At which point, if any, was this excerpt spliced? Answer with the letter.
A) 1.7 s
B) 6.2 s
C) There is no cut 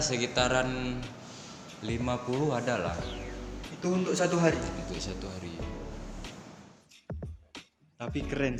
C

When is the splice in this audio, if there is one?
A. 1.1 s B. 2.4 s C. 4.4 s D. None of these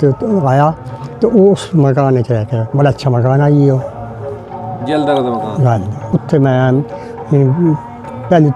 D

